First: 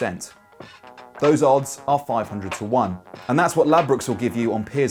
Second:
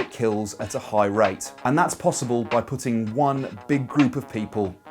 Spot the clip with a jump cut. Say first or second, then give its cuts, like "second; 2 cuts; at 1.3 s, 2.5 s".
second; 1 cut; at 1.5 s